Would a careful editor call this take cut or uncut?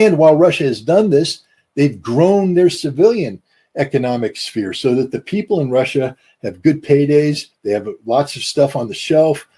uncut